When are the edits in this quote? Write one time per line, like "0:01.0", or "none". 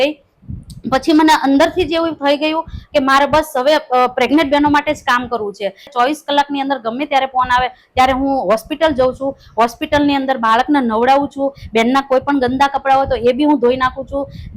0:05.9

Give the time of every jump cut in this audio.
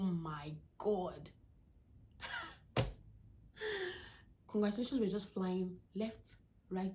none

